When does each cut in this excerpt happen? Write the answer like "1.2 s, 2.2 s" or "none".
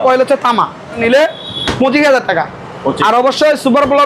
1.0 s